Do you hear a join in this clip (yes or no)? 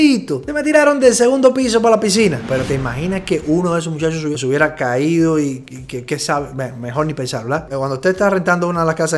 yes